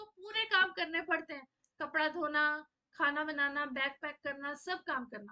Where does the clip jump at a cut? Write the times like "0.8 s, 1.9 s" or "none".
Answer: none